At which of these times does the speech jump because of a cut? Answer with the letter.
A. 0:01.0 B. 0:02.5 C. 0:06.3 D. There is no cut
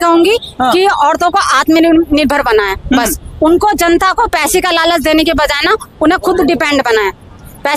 D